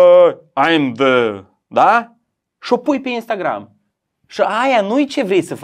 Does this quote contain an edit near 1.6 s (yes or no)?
no